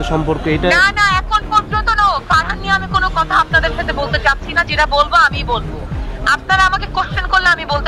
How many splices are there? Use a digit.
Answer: 0